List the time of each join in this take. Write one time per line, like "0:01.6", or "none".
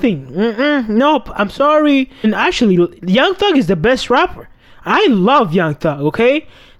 0:02.2